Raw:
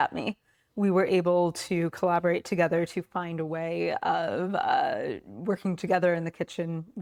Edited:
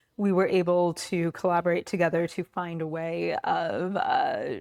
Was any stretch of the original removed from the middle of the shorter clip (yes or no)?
no